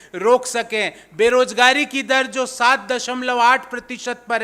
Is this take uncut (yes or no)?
yes